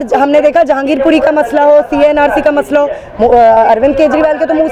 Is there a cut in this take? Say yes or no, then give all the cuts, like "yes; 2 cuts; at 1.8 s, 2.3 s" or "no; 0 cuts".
no; 0 cuts